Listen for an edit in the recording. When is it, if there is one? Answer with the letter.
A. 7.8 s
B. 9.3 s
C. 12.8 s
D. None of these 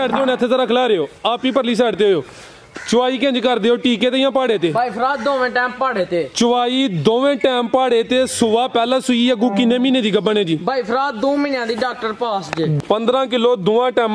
C